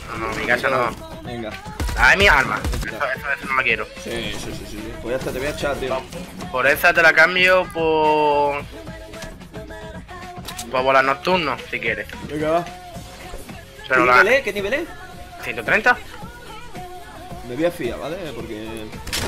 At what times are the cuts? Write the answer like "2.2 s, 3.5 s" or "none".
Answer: 2.7 s

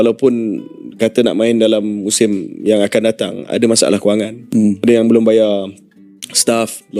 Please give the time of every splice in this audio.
none

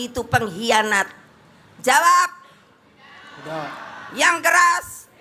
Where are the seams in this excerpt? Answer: none

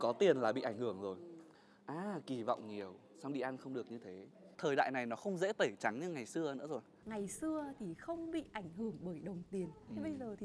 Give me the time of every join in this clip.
1.5 s, 4.5 s, 7.0 s

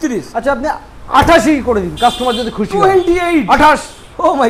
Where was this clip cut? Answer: none

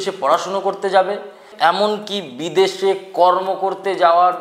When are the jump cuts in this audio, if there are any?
1.5 s

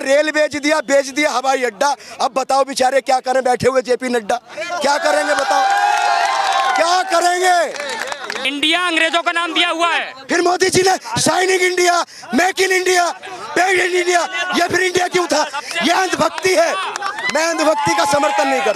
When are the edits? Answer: 8.4 s

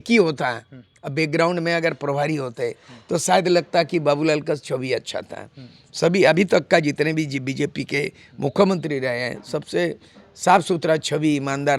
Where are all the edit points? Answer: none

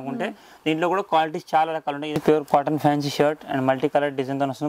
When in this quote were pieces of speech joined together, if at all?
2.2 s

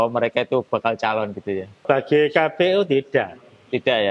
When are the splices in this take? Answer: 1.8 s

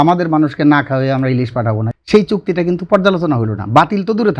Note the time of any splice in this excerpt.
1.8 s

